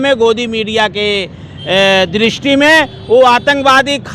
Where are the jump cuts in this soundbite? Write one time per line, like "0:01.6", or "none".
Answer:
none